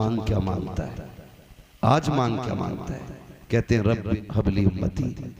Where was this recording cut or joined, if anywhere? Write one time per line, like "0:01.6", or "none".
0:04.2